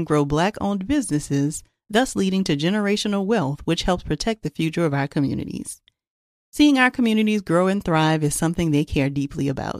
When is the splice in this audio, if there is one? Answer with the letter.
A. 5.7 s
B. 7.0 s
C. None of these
C